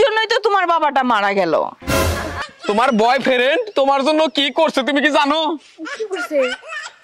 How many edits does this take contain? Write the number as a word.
one